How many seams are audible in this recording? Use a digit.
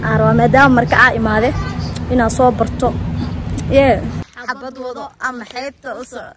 1